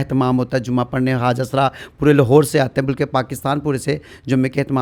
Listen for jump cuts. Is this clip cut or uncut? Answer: uncut